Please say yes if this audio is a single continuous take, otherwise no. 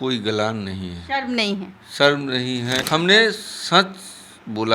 no